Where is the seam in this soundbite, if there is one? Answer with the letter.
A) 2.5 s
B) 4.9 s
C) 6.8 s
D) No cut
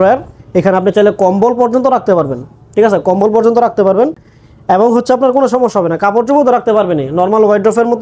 D